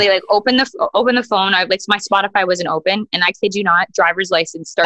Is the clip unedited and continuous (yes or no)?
yes